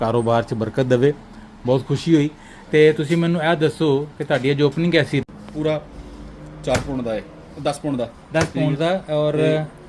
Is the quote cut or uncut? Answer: cut